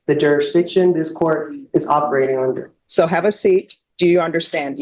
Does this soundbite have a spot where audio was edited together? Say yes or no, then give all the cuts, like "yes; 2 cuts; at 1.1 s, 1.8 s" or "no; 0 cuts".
yes; 2 cuts; at 2.7 s, 3.8 s